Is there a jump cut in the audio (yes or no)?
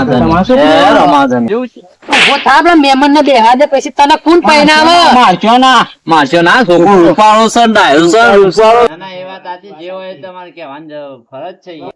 yes